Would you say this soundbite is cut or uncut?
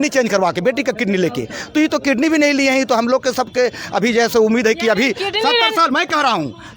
uncut